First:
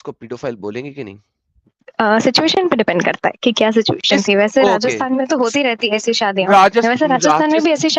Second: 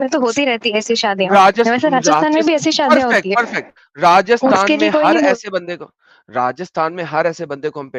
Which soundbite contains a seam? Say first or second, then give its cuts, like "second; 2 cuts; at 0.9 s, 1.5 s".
first; 1 cut; at 1.8 s